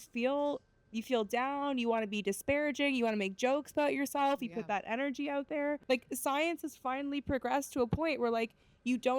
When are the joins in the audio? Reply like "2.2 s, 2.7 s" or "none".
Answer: 5.8 s